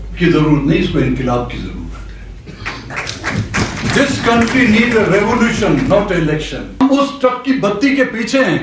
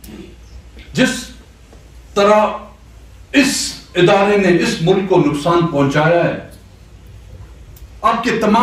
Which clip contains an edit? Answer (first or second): first